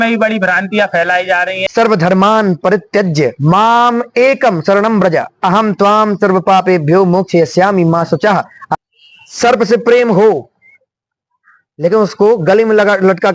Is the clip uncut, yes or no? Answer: no